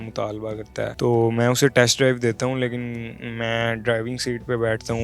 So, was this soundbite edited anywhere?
yes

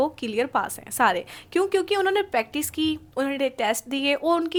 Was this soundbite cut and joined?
no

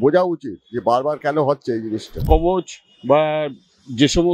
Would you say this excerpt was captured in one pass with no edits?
no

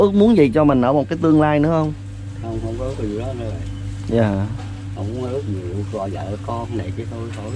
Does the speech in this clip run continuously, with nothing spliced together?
yes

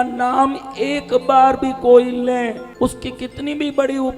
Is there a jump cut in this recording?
yes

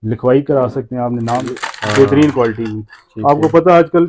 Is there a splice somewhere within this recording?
yes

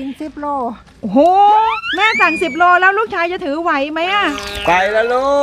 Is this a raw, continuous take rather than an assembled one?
no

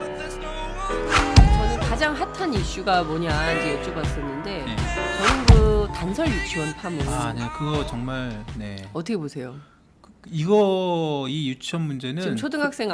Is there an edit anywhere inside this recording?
no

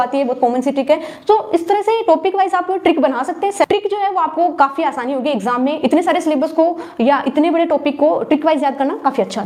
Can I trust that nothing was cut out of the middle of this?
yes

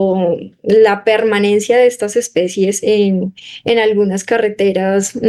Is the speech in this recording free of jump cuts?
yes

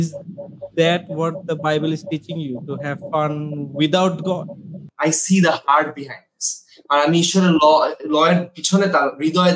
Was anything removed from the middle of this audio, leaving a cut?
yes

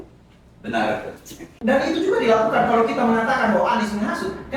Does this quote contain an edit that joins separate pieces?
yes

